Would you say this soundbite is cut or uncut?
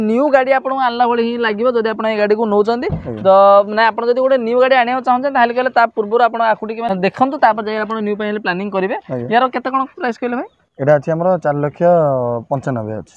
uncut